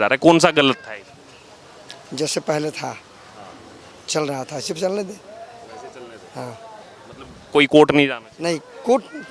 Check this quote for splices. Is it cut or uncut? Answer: uncut